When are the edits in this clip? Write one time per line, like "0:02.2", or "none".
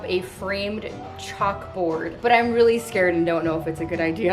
0:02.1

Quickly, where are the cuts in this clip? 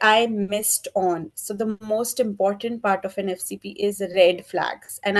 none

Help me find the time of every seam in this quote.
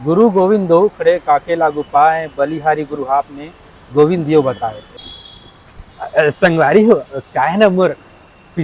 0:05.0

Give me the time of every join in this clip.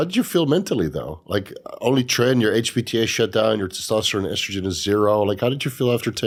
none

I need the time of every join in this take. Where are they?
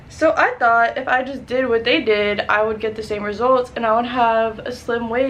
none

